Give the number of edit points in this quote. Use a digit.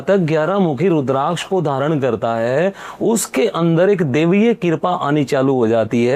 0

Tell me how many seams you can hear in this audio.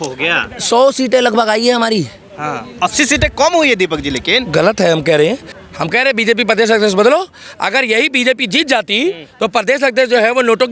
1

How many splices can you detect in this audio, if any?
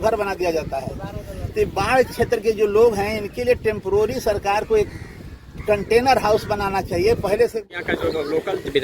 1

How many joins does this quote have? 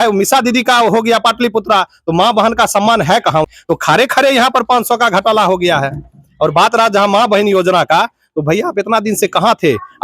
1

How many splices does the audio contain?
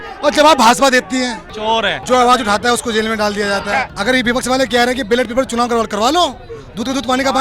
2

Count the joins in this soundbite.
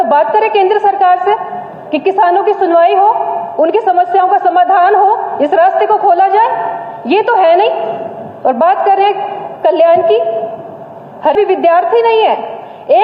1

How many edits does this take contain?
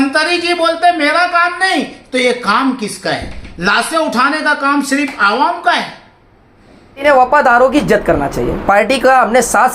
1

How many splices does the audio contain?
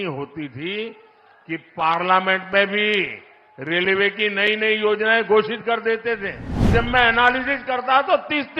1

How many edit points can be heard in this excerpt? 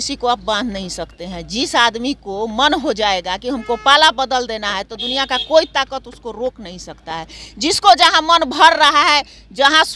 0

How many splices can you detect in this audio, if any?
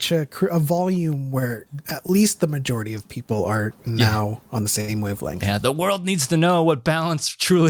0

